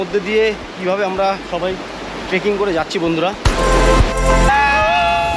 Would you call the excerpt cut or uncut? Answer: cut